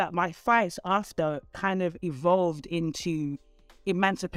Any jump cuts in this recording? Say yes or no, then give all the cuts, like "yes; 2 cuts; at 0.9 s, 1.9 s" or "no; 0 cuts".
no; 0 cuts